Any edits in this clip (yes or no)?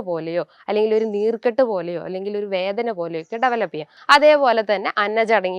yes